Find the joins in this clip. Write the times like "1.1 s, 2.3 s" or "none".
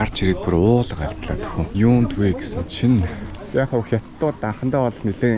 1.6 s, 3.4 s